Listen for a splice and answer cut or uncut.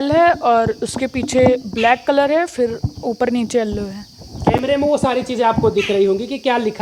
uncut